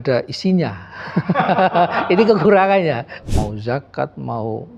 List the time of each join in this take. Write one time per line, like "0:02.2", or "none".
0:03.2